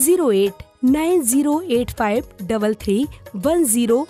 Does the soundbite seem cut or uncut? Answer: uncut